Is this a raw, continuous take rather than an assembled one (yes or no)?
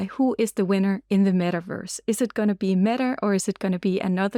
yes